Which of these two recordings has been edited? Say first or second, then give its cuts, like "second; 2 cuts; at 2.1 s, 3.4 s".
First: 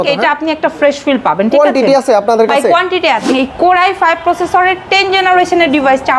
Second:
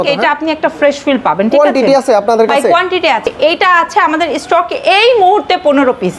first; 1 cut; at 3.3 s